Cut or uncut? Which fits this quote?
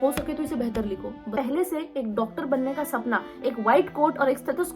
cut